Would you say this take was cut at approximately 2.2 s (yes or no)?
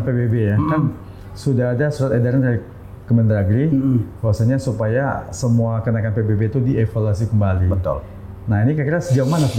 no